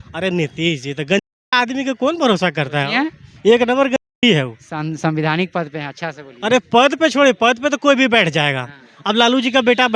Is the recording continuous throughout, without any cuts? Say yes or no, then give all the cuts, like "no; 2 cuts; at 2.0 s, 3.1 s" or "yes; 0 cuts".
yes; 0 cuts